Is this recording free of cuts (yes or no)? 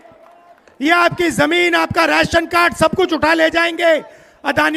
yes